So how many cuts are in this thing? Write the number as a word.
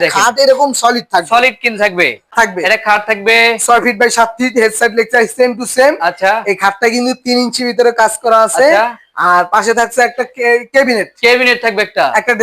one